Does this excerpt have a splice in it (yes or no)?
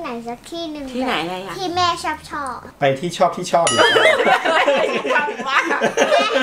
yes